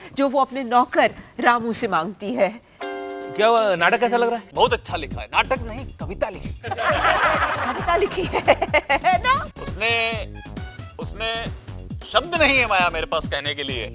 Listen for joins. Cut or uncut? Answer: cut